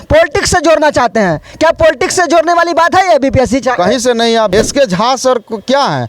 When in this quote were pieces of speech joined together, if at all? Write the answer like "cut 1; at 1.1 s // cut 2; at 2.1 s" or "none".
cut 1; at 4.5 s